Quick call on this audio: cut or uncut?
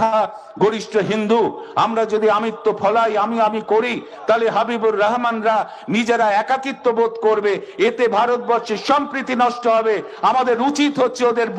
uncut